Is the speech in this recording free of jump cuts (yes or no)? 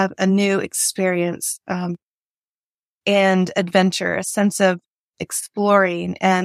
yes